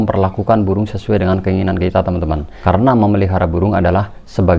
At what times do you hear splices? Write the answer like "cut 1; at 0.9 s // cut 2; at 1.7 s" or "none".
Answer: cut 1; at 2.5 s